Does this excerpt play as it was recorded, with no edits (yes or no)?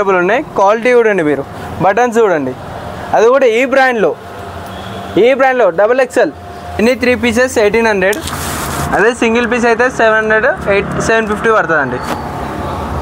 no